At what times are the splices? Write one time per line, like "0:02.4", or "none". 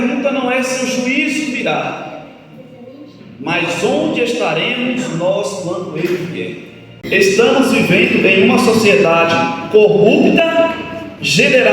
0:06.9